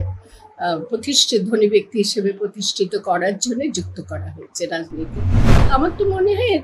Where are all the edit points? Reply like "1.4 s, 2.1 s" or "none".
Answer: 5.6 s